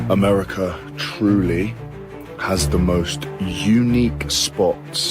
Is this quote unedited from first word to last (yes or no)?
yes